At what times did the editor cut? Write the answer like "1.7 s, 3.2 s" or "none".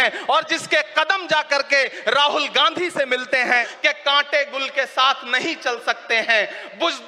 3.7 s